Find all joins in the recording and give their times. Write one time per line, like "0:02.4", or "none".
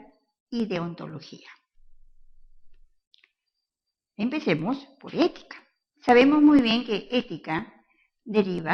none